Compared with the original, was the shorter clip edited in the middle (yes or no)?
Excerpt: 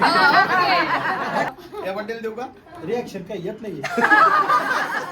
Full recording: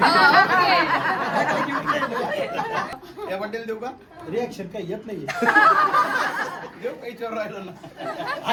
yes